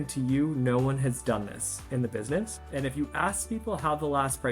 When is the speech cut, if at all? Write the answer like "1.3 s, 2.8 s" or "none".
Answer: 2.6 s